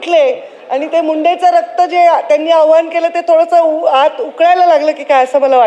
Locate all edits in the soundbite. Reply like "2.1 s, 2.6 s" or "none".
none